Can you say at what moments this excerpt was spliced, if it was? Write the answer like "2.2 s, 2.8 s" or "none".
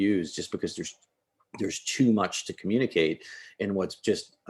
none